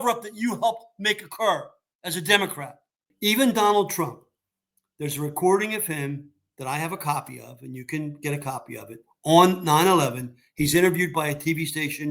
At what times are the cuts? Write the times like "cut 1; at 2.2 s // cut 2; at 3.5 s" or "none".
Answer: cut 1; at 3.1 s